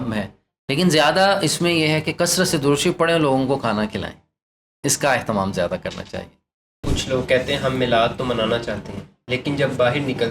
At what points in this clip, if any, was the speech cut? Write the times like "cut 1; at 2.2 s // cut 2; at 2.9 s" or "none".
cut 1; at 6.8 s